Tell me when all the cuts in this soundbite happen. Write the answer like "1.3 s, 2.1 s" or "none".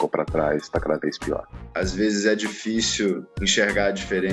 1.6 s, 3.3 s